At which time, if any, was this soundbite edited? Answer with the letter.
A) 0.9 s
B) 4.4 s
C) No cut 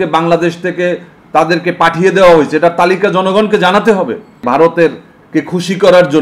B